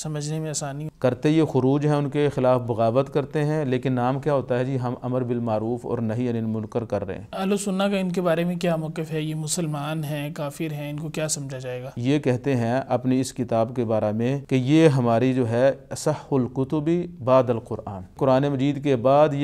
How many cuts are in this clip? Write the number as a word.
five